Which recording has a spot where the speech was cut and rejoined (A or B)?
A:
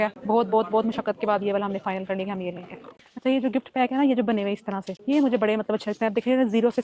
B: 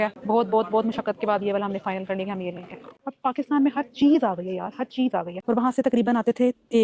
B